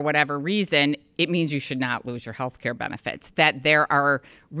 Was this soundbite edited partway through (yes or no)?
no